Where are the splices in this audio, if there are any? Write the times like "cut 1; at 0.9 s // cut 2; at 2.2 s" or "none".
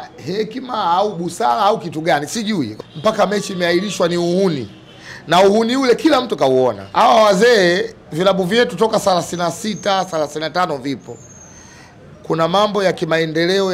cut 1; at 2.7 s // cut 2; at 6.8 s